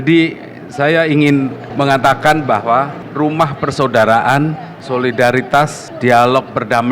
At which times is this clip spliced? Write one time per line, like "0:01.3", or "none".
0:01.6
0:03.0
0:04.7
0:05.8